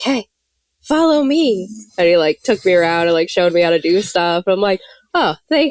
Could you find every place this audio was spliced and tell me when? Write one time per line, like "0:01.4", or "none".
none